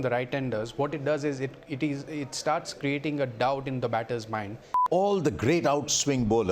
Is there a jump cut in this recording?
yes; 1 cut; at 4.8 s

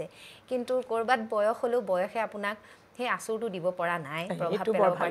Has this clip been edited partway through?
no; 0 cuts

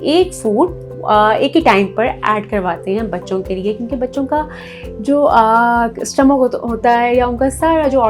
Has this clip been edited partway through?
no; 0 cuts

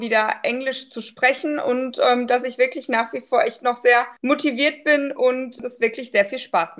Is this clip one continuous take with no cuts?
no; 2 cuts; at 4.1 s, 5.6 s

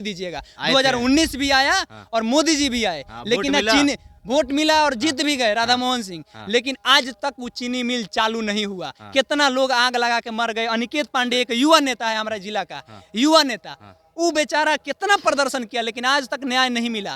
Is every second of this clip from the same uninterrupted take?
yes; 0 cuts

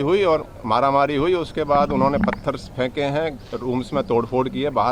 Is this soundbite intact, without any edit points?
yes; 0 cuts

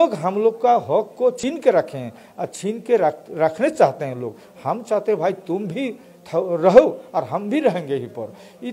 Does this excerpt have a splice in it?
yes; 1 cut; at 1.4 s

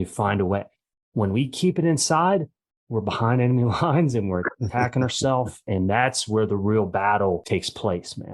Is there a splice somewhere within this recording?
yes; 2 cuts; at 5.7 s, 7.4 s

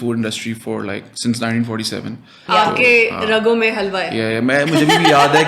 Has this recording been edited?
yes; 1 cut; at 2.3 s

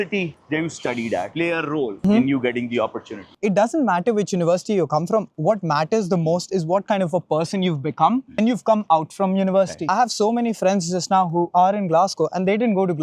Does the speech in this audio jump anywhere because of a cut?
yes; 2 cuts; at 3.3 s, 9.8 s

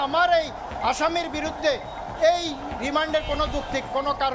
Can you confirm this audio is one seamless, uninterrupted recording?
yes; 0 cuts

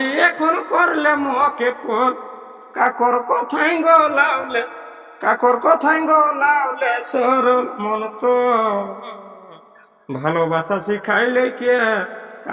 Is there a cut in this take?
no; 0 cuts

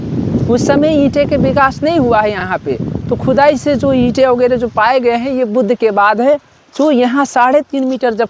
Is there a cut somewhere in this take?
no; 0 cuts

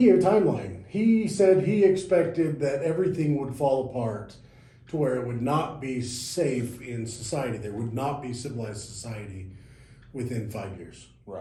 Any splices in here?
no; 0 cuts

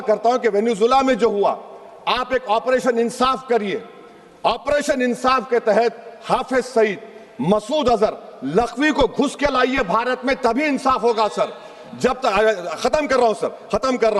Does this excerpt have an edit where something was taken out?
no; 0 cuts

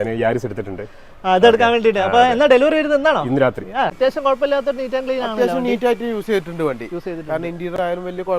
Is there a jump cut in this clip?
yes; 1 cut; at 3.9 s

